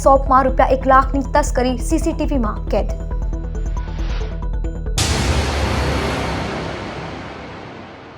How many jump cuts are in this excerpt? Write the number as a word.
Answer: one